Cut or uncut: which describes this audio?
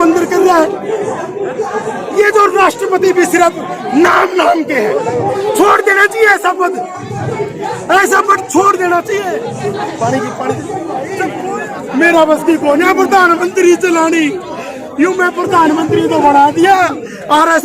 cut